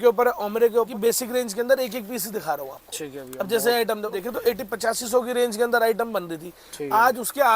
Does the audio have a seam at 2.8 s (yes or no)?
no